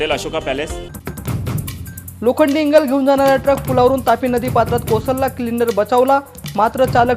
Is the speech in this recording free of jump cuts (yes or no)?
no